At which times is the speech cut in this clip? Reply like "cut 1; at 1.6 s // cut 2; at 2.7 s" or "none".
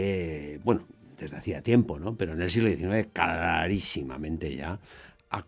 none